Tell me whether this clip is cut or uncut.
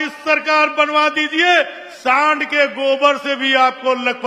uncut